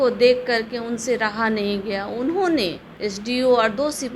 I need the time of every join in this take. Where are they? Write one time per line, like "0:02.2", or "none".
0:02.9